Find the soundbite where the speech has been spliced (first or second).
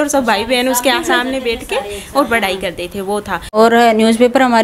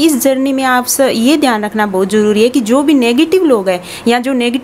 first